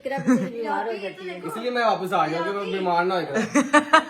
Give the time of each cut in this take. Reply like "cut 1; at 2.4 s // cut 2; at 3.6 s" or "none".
none